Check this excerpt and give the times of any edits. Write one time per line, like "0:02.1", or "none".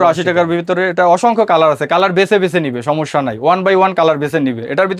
none